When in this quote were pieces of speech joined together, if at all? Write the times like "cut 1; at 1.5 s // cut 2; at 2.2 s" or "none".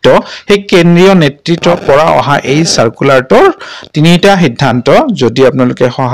cut 1; at 1.8 s